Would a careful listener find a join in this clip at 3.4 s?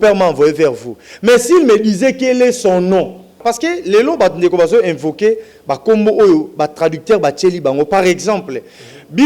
yes; 1 cut; at 3.4 s

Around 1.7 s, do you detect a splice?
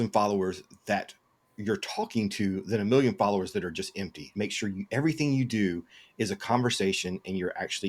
no; 1 cut; at 4.3 s

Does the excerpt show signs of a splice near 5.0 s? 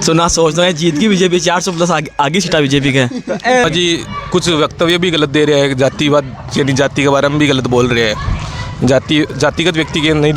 no; 1 cut; at 3.6 s

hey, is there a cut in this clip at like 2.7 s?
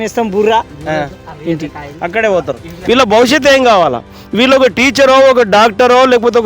yes; 1 cut; at 2.7 s

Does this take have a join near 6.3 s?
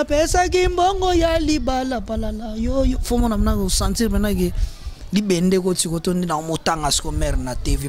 no; 0 cuts

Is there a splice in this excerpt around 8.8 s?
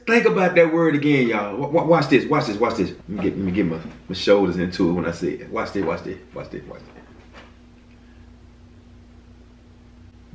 no; 1 cut; at 3.0 s

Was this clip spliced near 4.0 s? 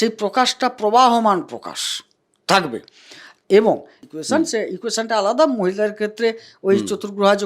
yes; 1 cut; at 4.0 s

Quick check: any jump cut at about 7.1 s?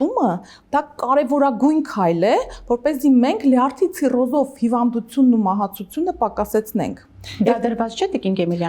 no; 0 cuts

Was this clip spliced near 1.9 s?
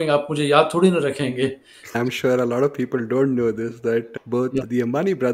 yes; 1 cut; at 1.9 s

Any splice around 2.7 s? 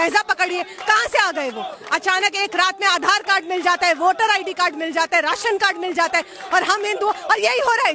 no; 0 cuts

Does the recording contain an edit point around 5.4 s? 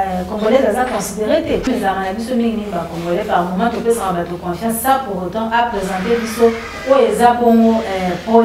no; 1 cut; at 1.7 s

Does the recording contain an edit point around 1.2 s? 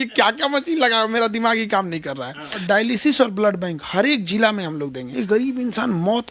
no; 2 cuts; at 2.6 s, 5.0 s

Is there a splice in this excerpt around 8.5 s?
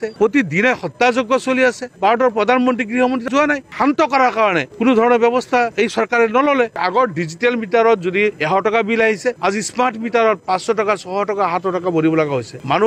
no; 3 cuts; at 1.9 s, 3.7 s, 6.7 s

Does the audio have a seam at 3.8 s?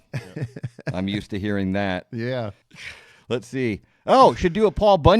no; 1 cut; at 2.6 s

